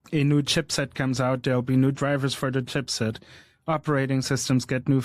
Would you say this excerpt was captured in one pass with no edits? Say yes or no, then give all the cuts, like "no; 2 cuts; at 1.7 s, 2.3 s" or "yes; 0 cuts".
yes; 0 cuts